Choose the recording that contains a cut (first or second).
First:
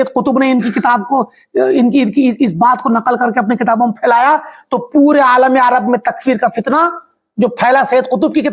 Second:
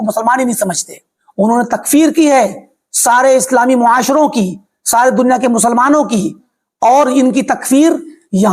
second